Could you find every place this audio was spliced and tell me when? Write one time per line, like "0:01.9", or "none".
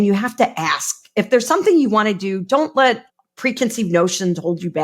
0:03.1

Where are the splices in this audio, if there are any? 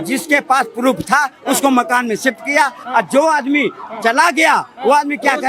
none

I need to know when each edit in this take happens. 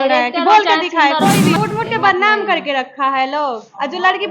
0:01.6

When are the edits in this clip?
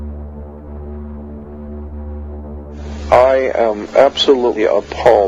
none

